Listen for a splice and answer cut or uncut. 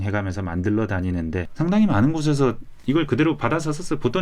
cut